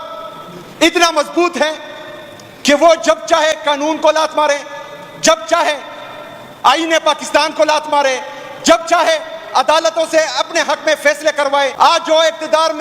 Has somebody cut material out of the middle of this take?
yes; 1 cut; at 11.7 s

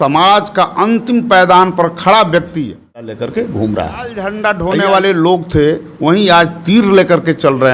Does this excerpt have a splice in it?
yes; 2 cuts; at 3.0 s, 4.3 s

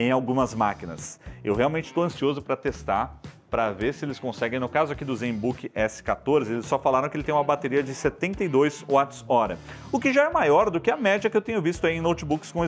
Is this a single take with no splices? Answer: yes; 0 cuts

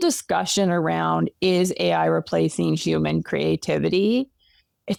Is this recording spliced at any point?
no; 0 cuts

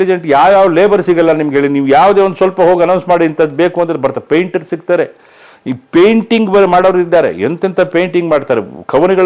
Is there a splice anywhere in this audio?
no; 0 cuts

